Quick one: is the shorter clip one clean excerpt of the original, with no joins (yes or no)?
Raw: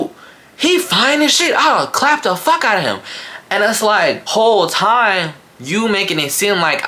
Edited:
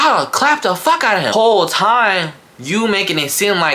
no